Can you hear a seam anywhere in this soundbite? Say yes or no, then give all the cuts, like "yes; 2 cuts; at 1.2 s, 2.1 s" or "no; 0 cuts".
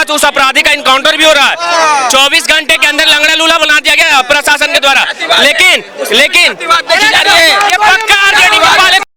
no; 0 cuts